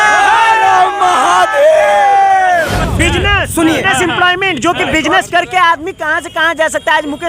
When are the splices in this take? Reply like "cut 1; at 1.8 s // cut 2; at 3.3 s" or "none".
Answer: cut 1; at 2.8 s